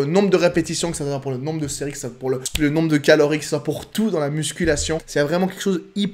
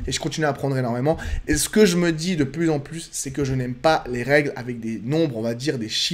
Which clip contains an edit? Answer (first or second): first